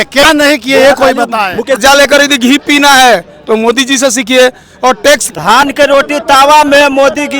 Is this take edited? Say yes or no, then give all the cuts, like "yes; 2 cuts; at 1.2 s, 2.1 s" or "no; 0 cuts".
yes; 2 cuts; at 1.8 s, 5.3 s